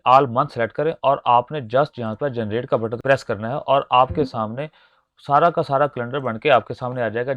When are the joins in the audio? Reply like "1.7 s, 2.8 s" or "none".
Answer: 3.0 s